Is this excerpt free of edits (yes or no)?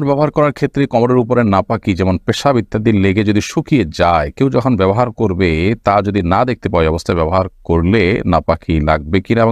yes